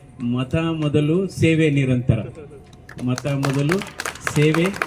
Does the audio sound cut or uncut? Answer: uncut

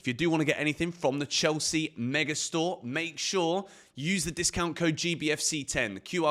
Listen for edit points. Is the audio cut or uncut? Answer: uncut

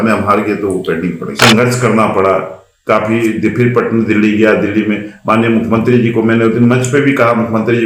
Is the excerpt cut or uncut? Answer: cut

